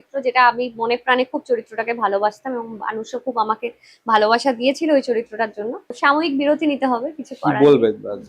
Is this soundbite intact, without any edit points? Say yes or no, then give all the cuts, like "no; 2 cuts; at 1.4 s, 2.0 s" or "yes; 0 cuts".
no; 1 cut; at 5.9 s